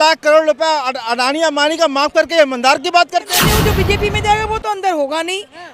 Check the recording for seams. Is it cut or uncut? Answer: cut